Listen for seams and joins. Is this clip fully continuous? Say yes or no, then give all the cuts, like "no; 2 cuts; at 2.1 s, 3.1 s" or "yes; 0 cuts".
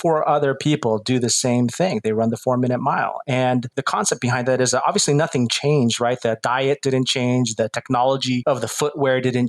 no; 2 cuts; at 3.7 s, 8.4 s